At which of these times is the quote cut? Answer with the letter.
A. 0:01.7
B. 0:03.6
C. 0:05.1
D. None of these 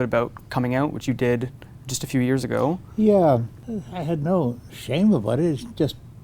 B